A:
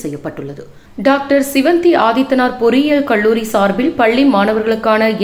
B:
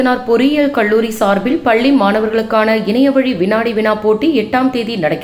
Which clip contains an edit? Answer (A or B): A